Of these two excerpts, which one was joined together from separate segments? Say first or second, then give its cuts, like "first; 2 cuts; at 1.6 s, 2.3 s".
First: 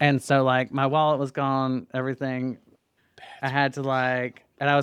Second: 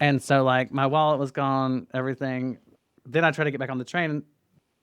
second; 1 cut; at 2.9 s